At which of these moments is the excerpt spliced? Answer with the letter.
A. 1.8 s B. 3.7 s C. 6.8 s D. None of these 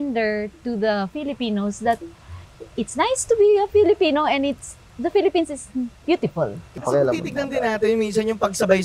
C